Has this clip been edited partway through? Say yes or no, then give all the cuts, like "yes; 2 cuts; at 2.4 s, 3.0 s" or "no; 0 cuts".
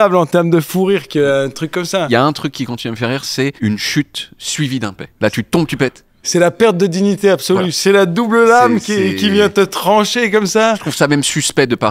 yes; 5 cuts; at 2.1 s, 3.6 s, 5.0 s, 6.3 s, 10.9 s